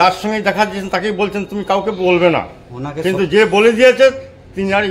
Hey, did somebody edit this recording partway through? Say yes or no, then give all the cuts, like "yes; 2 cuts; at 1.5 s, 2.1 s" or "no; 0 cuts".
no; 0 cuts